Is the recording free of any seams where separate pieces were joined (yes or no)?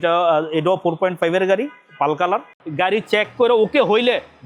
no